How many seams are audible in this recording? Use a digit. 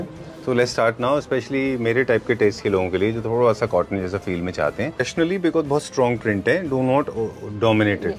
1